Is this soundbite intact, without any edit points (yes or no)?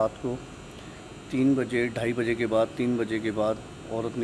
yes